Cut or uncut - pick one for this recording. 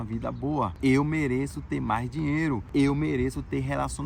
cut